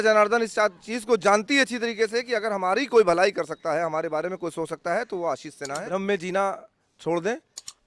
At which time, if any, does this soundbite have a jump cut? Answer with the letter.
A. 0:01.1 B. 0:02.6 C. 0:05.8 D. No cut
C